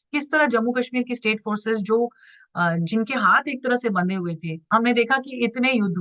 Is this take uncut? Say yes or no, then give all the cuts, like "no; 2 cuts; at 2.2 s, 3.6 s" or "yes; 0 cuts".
no; 1 cut; at 4.6 s